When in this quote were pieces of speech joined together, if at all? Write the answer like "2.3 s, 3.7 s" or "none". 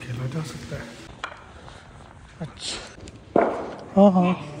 1.1 s, 3.3 s